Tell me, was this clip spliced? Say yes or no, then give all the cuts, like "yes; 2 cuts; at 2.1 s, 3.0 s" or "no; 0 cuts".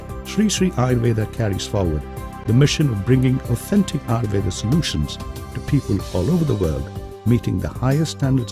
yes; 1 cut; at 4.6 s